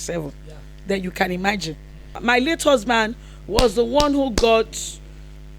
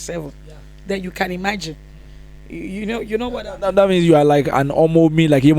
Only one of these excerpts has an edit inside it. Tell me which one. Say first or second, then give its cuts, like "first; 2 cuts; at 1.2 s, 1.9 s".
first; 1 cut; at 2.1 s